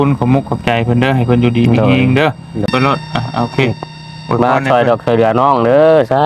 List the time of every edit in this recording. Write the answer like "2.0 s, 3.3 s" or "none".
2.7 s